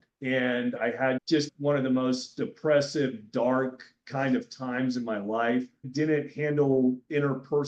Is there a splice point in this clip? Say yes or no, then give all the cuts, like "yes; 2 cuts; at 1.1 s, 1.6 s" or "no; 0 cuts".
no; 0 cuts